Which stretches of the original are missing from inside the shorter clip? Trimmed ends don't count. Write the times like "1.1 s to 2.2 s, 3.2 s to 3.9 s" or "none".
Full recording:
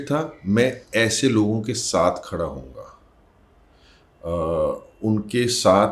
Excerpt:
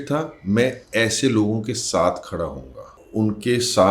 3.0 s to 4.9 s

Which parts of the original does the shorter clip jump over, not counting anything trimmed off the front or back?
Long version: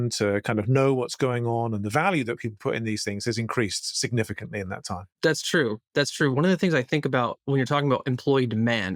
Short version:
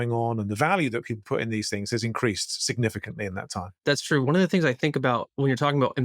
5.1 s to 5.8 s

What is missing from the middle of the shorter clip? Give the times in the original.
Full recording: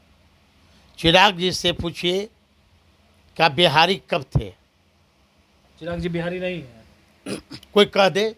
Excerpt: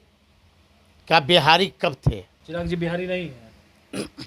4.6 s to 5.7 s

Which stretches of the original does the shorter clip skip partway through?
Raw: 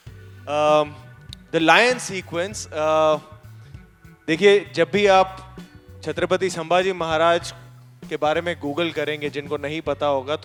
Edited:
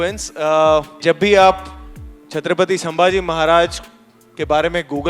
3.3 s to 4.7 s

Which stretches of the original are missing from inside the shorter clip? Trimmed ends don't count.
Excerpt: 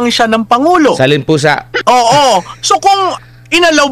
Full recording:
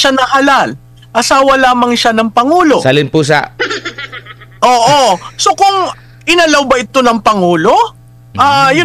3.5 s to 4.5 s

